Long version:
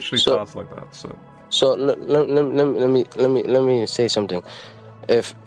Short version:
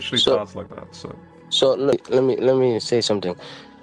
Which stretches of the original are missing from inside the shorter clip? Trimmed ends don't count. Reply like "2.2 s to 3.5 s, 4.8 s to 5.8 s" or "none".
2.0 s to 3.1 s